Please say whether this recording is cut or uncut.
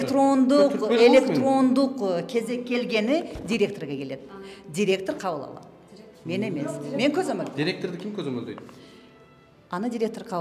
uncut